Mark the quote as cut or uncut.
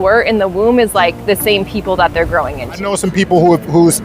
cut